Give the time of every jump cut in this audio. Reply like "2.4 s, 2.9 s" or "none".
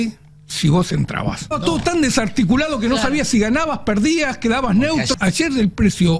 1.6 s, 5.1 s

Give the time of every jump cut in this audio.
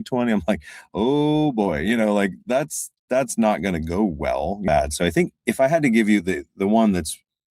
4.6 s

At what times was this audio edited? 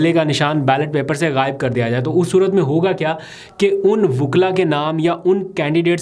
none

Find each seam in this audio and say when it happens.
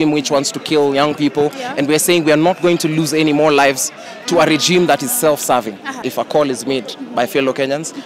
6.0 s

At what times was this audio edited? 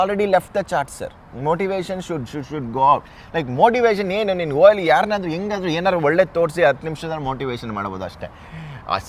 none

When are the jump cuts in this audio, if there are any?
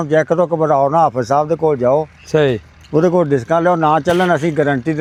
none

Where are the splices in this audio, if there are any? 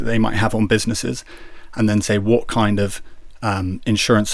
none

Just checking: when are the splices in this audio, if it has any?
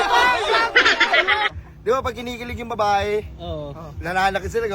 1.6 s

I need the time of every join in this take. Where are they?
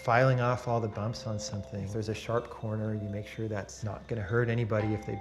1.8 s

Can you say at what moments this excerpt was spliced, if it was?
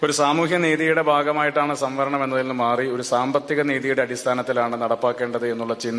none

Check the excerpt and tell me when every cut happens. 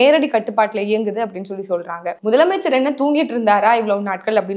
2.1 s

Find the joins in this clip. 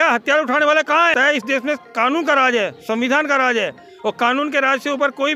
1.1 s

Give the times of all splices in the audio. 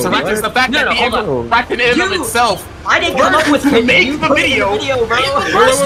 none

